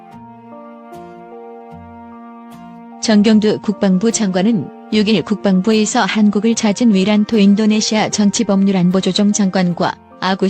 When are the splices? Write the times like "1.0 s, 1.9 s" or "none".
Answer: 3.1 s